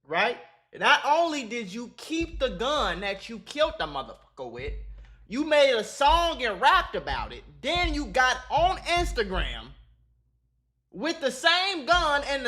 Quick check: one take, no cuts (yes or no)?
yes